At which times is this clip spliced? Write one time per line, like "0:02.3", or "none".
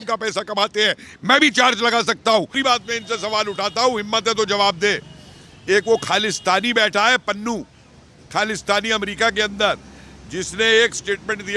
0:02.5

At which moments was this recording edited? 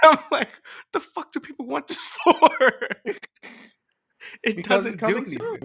none

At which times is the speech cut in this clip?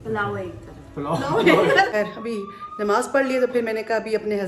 0:01.9

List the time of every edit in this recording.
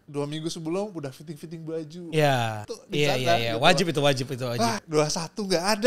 0:02.6
0:04.8

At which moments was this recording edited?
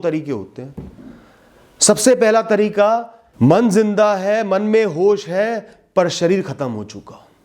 0:03.2

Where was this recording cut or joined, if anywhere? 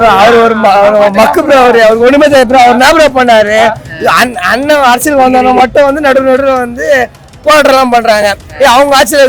none

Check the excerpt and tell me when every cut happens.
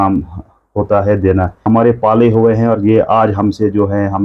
0:01.6

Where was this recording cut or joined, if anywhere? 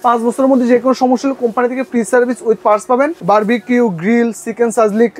0:03.2

